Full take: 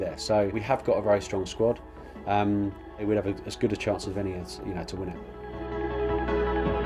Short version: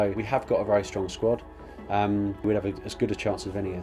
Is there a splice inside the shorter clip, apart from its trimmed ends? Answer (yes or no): yes